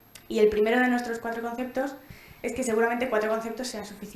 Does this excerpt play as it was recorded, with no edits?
yes; 0 cuts

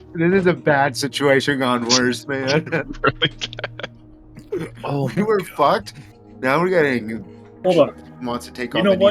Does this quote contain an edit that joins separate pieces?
yes; 1 cut; at 7.6 s

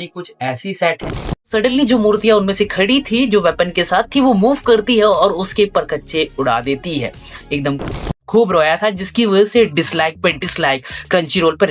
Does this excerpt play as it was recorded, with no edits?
no; 2 cuts; at 1.4 s, 7.8 s

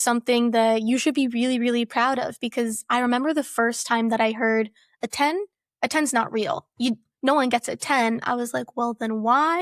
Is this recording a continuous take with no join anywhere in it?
yes; 0 cuts

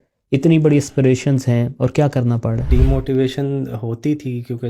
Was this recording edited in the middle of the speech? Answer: yes; 1 cut; at 2.7 s

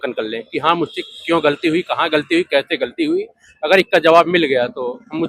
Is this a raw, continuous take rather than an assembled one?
yes; 0 cuts

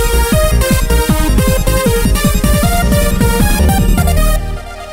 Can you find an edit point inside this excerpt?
yes; 1 cut; at 1.9 s

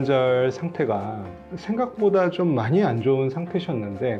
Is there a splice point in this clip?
no; 0 cuts

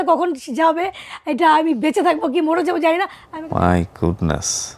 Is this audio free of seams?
no; 1 cut; at 3.2 s

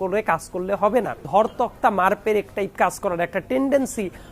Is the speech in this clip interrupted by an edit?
yes; 1 cut; at 1.2 s

